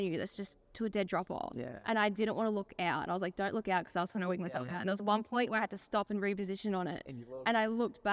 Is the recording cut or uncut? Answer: uncut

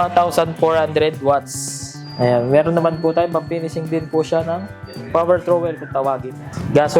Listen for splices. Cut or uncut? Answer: cut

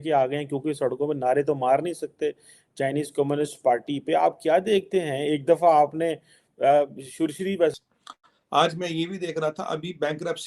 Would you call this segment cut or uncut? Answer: cut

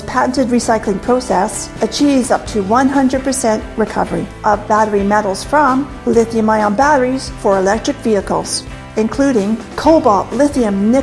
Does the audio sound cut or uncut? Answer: uncut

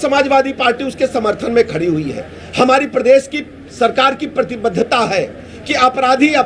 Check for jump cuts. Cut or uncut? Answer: uncut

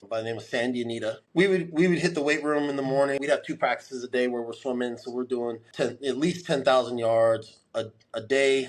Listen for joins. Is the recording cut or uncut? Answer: cut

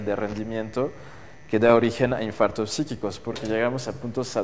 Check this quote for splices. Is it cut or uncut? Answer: cut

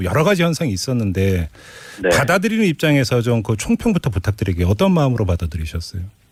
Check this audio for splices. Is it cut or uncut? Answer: uncut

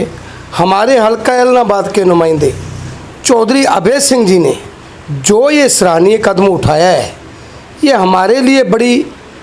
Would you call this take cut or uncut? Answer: uncut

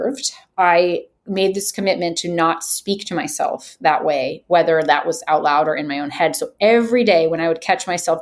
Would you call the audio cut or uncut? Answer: uncut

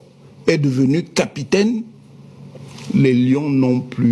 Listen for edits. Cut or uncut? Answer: uncut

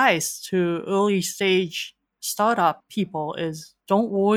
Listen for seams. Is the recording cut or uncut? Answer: cut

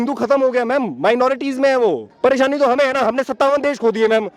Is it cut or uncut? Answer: cut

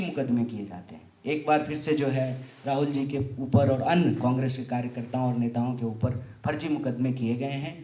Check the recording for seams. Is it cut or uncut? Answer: uncut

